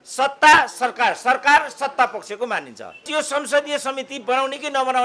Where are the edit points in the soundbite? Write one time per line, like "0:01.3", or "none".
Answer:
0:03.1